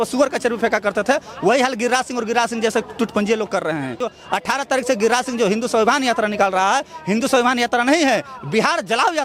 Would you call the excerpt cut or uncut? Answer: cut